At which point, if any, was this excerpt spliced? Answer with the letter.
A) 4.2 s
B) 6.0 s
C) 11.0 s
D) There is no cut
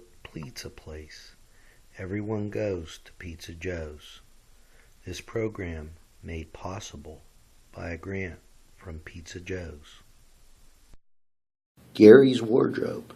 C